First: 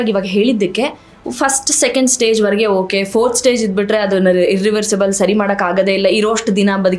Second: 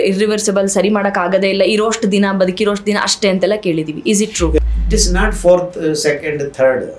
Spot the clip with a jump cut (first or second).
second